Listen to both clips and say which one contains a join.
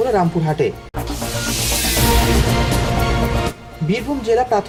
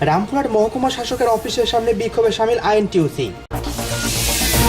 second; 1 cut; at 3.4 s

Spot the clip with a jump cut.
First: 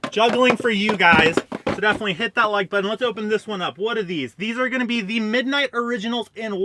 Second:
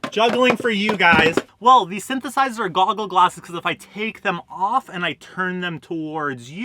second; 1 cut; at 1.5 s

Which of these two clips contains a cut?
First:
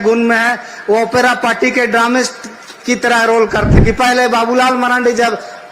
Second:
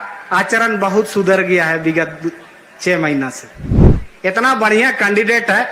first; 1 cut; at 3.7 s

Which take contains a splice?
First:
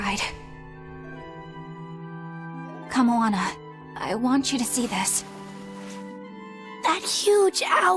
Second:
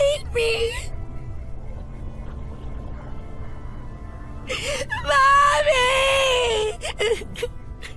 second; 1 cut; at 4.4 s

